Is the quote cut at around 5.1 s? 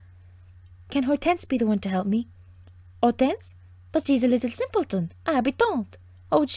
no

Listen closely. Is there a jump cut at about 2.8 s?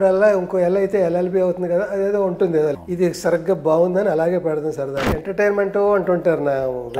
yes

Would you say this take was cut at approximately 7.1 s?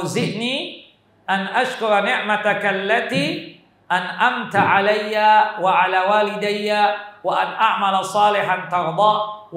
no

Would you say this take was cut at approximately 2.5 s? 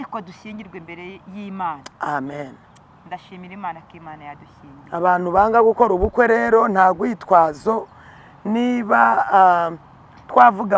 no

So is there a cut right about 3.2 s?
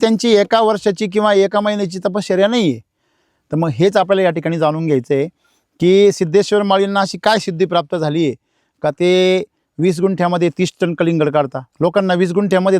no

